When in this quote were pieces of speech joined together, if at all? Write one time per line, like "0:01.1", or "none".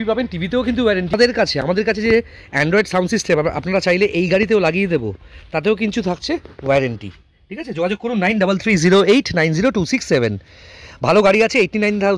none